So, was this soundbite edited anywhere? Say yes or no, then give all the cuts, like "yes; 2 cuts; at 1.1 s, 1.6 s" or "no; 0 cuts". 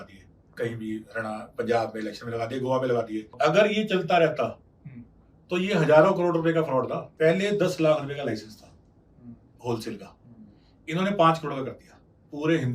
yes; 2 cuts; at 3.2 s, 7.0 s